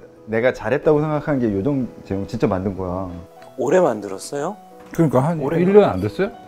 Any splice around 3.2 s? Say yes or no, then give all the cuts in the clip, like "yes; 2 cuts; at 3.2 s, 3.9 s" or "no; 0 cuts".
no; 0 cuts